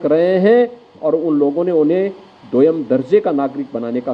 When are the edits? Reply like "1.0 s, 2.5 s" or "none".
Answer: none

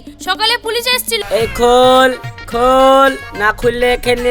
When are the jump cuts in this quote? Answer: 1.2 s

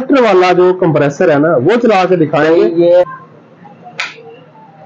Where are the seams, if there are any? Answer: 3.0 s

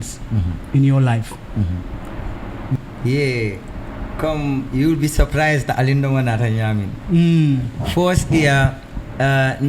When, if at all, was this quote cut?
2.8 s

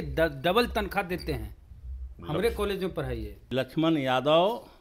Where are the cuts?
3.4 s

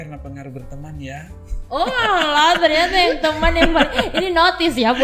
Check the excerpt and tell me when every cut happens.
none

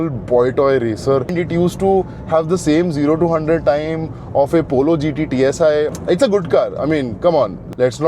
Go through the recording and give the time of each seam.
1.3 s, 5.9 s

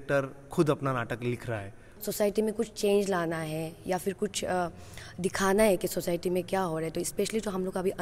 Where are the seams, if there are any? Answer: 2.0 s

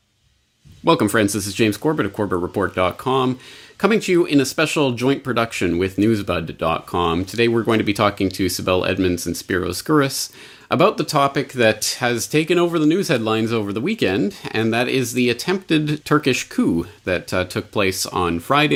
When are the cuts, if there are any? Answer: none

